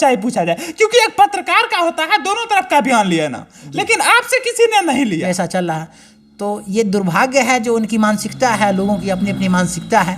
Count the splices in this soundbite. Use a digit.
1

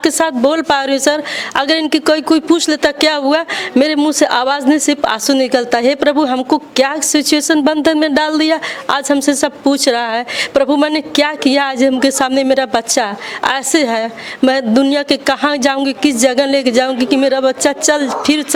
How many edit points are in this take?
0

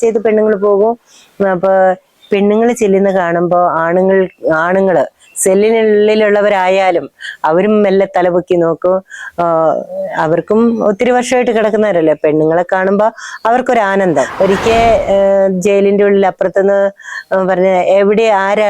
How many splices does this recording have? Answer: 1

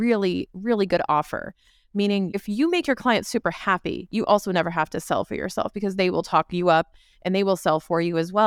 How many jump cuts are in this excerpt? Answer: 1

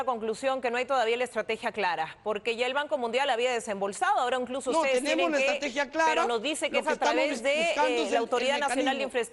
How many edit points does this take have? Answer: 0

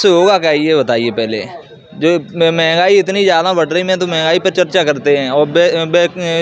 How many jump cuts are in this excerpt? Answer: 0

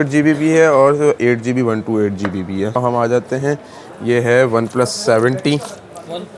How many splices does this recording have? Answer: 1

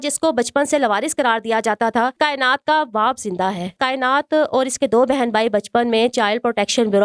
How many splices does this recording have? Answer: 2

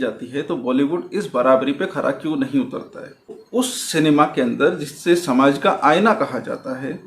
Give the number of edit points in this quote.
1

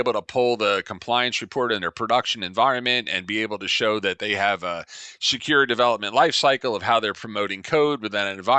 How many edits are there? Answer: 0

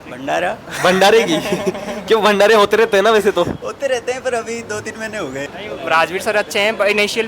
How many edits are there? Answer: 1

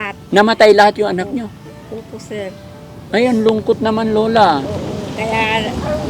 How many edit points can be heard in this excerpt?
0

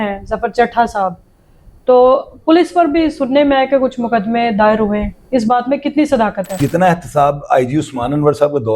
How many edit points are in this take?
1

